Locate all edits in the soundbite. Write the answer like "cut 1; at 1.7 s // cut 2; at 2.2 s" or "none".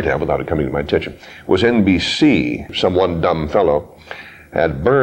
cut 1; at 2.7 s